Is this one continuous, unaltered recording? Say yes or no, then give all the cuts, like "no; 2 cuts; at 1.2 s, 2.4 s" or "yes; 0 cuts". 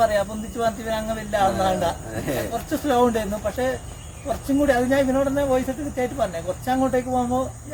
yes; 0 cuts